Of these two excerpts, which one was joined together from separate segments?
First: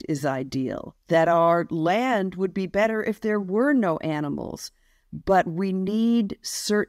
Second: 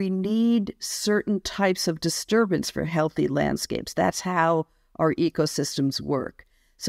first; 1 cut; at 0.9 s

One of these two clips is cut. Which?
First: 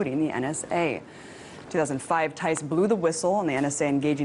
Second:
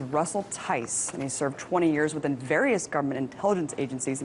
first; 1 cut; at 3.2 s

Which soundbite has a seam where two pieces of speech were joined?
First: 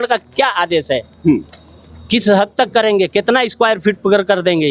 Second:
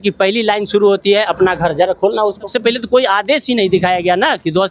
second; 1 cut; at 2.5 s

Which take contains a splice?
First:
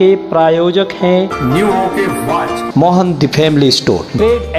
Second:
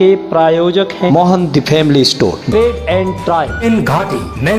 second; 2 cuts; at 1.1 s, 3.6 s

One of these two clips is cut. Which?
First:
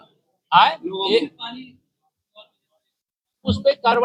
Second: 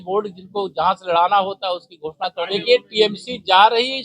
second; 1 cut; at 2.4 s

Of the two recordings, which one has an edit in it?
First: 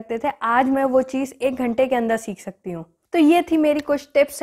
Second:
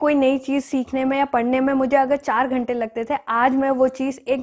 first; 1 cut; at 3.0 s

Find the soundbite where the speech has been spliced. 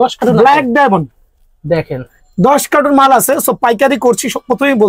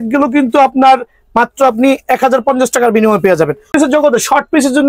second; 1 cut; at 3.7 s

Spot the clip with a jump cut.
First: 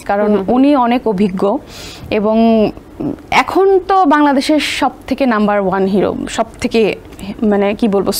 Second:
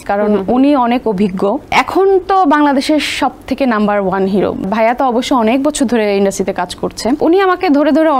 second; 3 cuts; at 1.6 s, 4.7 s, 7.2 s

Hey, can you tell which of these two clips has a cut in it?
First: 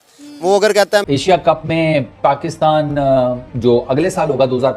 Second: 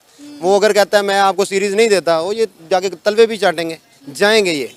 first; 1 cut; at 1.0 s

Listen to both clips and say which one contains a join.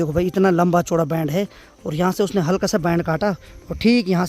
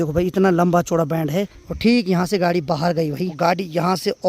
second; 2 cuts; at 1.6 s, 3.3 s

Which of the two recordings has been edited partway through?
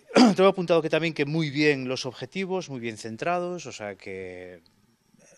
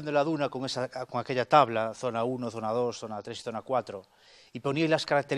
first; 1 cut; at 1.3 s

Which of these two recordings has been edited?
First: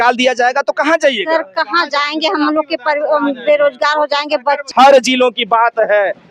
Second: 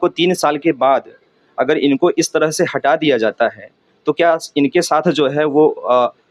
first; 1 cut; at 4.7 s

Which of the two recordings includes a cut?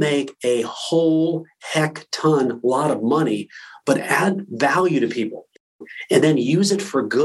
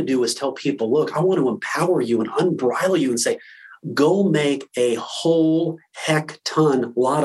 first; 1 cut; at 5.8 s

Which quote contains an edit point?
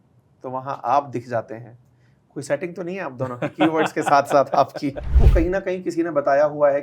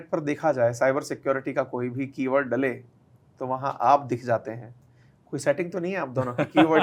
first; 1 cut; at 5.1 s

